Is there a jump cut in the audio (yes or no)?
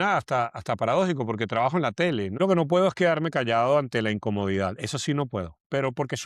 yes